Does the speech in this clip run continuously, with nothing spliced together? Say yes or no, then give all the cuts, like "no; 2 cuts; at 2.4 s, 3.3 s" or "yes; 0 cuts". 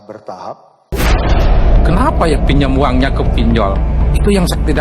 no; 1 cut; at 0.9 s